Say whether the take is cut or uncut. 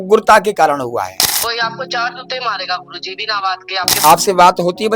cut